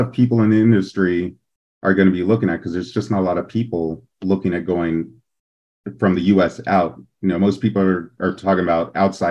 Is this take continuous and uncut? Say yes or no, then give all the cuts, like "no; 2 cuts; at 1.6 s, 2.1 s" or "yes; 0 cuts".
yes; 0 cuts